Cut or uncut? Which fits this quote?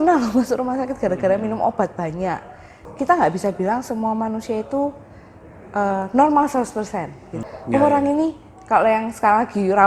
cut